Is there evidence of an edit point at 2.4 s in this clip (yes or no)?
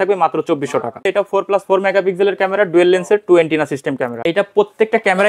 no